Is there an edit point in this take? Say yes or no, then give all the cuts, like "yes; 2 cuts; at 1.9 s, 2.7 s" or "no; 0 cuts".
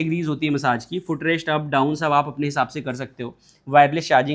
no; 0 cuts